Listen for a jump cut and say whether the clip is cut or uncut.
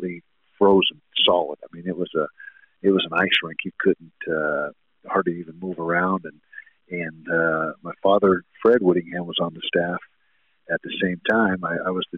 uncut